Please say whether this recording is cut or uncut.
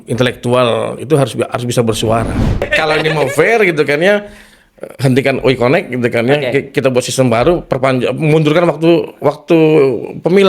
cut